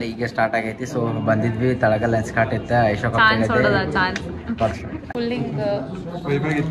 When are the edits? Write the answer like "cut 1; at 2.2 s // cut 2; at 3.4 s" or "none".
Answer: cut 1; at 5.1 s